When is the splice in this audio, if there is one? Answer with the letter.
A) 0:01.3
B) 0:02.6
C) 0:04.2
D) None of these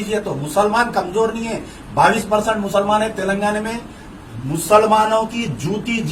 D